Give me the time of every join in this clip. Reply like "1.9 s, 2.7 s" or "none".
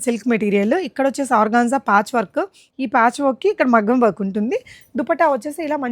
2.6 s